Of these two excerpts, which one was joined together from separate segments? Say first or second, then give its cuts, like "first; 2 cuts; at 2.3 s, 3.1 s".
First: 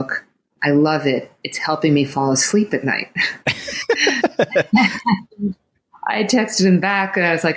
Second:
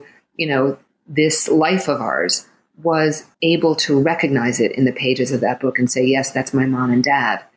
second; 1 cut; at 3.3 s